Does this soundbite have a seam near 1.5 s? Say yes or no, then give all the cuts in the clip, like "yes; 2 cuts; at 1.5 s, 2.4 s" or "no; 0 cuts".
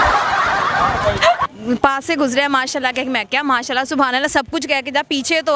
yes; 1 cut; at 1.5 s